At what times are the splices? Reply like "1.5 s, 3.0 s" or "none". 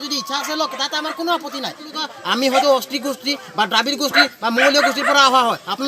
2.0 s